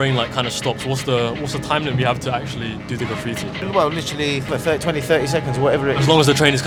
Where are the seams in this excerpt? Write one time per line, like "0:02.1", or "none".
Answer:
none